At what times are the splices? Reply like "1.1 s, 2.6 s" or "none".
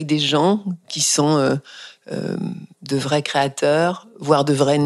none